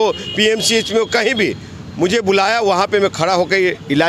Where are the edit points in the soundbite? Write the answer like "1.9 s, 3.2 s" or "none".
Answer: none